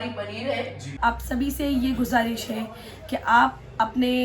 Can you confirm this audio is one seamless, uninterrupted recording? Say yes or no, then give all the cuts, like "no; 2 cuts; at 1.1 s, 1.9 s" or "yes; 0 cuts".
no; 1 cut; at 1.0 s